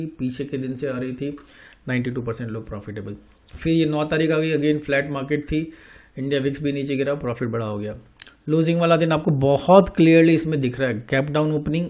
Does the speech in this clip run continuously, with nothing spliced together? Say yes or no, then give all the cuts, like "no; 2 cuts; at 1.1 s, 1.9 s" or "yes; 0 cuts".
yes; 0 cuts